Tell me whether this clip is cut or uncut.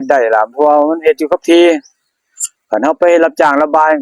uncut